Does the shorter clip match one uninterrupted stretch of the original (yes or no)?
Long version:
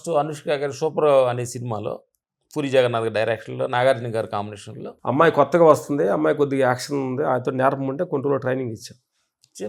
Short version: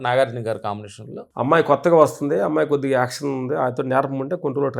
yes